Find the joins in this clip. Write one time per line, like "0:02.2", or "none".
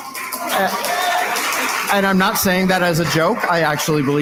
none